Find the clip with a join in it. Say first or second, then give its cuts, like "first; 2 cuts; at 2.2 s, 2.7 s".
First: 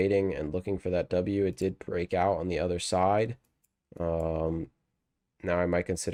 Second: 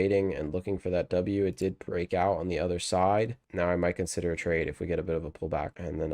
second; 1 cut; at 3.4 s